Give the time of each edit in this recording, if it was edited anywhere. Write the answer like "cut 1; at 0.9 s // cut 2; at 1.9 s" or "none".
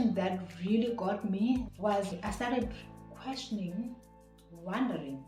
cut 1; at 1.7 s